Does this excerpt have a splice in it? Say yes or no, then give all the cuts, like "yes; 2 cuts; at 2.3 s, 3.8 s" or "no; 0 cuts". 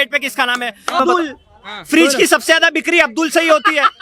yes; 1 cut; at 1.0 s